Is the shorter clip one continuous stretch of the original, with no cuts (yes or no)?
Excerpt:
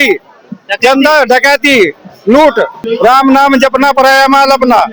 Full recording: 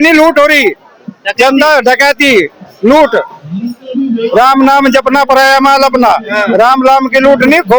no